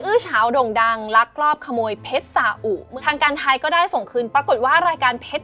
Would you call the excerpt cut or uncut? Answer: cut